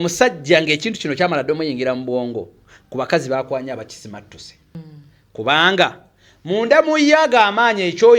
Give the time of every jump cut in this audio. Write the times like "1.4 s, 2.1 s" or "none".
4.7 s